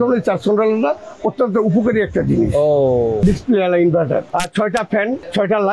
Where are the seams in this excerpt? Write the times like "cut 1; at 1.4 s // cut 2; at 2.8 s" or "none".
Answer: cut 1; at 3.2 s // cut 2; at 4.2 s

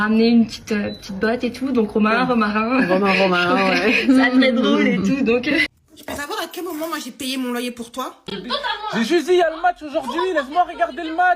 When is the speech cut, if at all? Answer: cut 1; at 5.7 s // cut 2; at 8.2 s

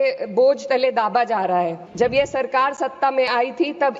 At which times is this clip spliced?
cut 1; at 1.8 s

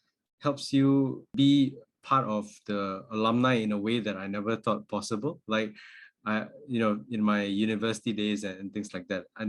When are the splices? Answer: cut 1; at 1.2 s

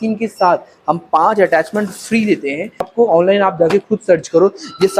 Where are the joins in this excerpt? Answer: cut 1; at 2.9 s

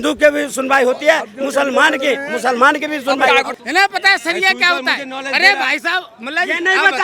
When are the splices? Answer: cut 1; at 3.5 s

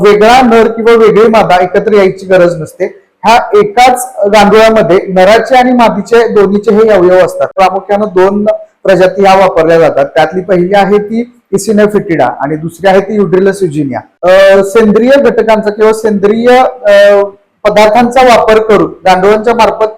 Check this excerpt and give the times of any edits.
cut 1; at 7.5 s // cut 2; at 14.0 s

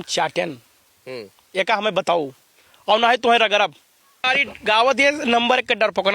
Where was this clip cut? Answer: cut 1; at 4.2 s

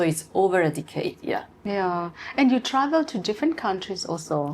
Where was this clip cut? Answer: cut 1; at 1.5 s

